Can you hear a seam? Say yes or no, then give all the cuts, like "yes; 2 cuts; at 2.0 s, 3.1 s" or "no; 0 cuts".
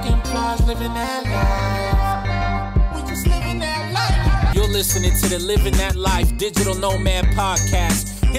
no; 0 cuts